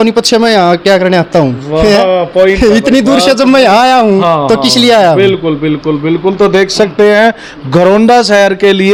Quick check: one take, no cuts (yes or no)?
yes